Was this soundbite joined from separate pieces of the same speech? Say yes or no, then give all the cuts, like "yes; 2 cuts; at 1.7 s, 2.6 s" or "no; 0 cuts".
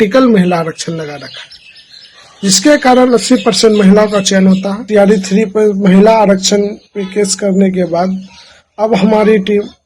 yes; 1 cut; at 4.8 s